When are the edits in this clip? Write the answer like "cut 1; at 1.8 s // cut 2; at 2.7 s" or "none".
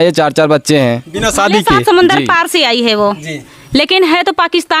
cut 1; at 1.7 s